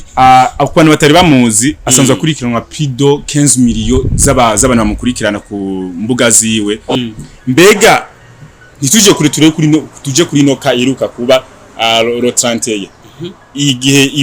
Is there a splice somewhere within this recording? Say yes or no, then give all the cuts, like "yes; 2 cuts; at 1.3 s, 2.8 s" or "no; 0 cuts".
yes; 1 cut; at 7.0 s